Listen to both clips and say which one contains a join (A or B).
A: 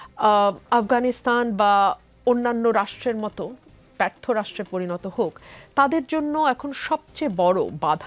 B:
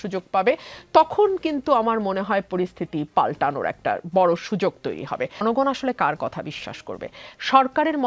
B